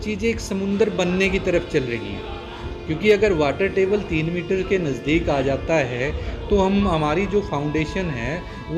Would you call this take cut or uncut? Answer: uncut